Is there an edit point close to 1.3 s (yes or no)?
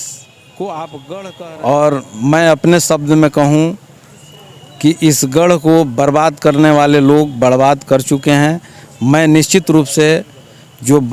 yes